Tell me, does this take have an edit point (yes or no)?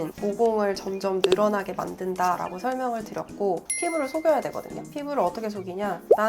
yes